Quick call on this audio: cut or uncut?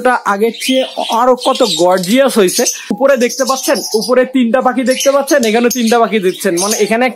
cut